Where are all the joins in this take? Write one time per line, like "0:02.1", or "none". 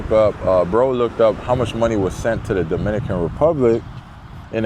none